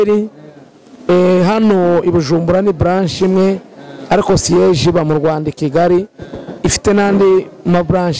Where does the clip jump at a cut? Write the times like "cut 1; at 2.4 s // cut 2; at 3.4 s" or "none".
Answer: none